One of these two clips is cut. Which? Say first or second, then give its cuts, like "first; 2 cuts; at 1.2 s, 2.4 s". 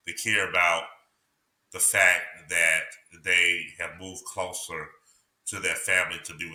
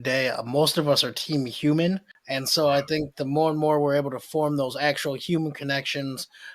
second; 1 cut; at 2.2 s